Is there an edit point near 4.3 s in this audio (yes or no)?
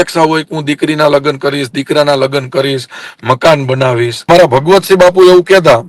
yes